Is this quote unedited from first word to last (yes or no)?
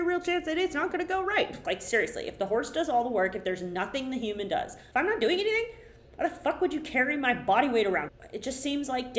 no